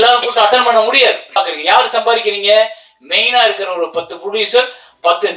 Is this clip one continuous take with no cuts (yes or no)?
no